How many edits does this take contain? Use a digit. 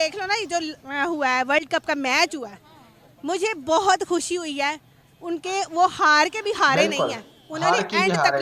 0